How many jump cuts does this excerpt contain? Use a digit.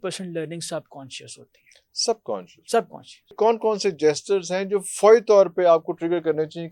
1